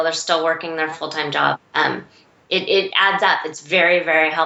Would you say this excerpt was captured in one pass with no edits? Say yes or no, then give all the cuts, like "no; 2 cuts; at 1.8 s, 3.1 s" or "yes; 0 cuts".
yes; 0 cuts